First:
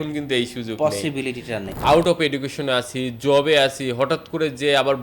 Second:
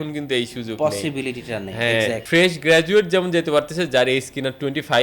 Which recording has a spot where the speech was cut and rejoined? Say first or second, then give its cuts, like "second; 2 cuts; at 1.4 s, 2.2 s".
first; 1 cut; at 1.8 s